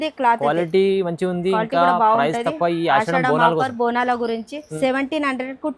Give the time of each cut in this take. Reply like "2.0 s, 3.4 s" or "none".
4.6 s